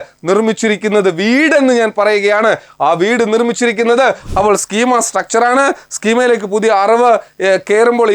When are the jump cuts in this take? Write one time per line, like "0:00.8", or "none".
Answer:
0:04.2